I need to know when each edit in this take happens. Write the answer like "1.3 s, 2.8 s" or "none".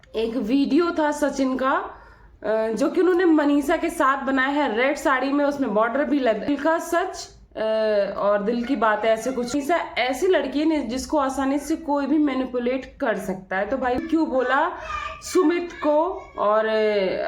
6.5 s, 9.5 s, 14.0 s